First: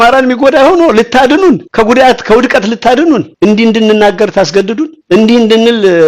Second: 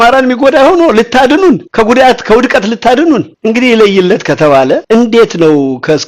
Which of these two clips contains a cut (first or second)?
first